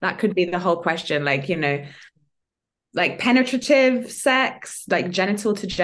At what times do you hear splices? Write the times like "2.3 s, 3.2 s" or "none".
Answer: none